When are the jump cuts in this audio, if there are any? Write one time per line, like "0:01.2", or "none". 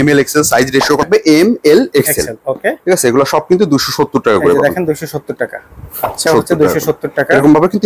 0:01.0
0:06.2